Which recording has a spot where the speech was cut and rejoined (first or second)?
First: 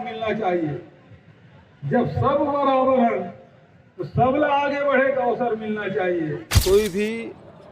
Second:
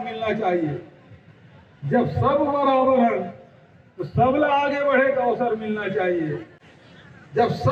first